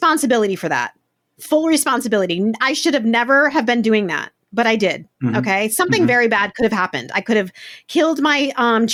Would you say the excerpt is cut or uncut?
uncut